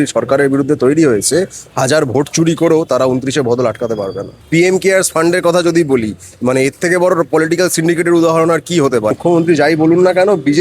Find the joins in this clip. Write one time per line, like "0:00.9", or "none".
0:04.3
0:09.1